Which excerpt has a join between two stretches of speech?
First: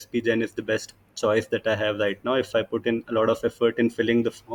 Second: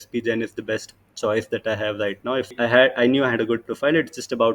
second; 1 cut; at 2.5 s

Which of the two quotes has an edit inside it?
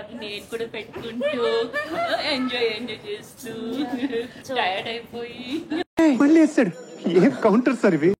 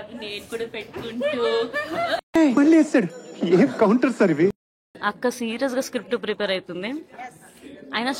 second; 2 cuts; at 2.2 s, 4.9 s

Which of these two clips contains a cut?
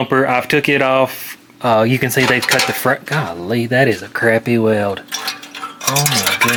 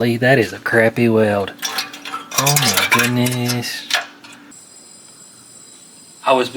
second; 1 cut; at 4.5 s

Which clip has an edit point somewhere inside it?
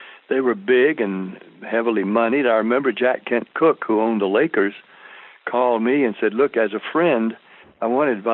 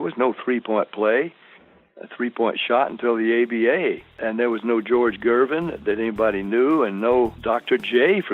second; 2 cuts; at 4.2 s, 7.4 s

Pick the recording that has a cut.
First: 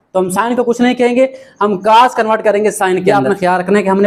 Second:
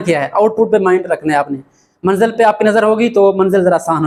first; 1 cut; at 3.0 s

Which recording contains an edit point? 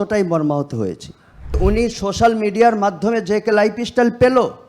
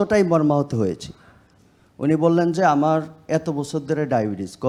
first; 1 cut; at 1.6 s

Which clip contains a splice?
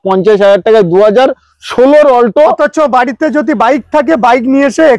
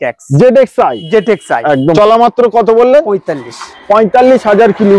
second; 1 cut; at 2.0 s

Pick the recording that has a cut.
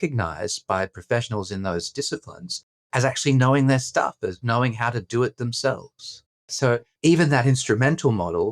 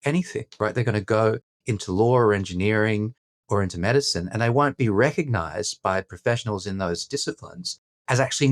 first; 1 cut; at 6.8 s

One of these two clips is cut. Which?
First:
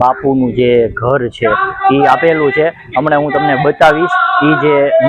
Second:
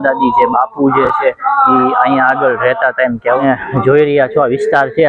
second; 1 cut; at 3.4 s

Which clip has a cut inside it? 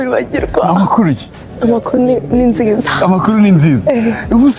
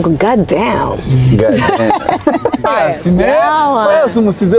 second; 1 cut; at 2.7 s

